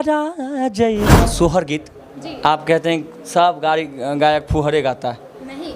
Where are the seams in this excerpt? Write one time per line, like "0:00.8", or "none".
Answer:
0:01.2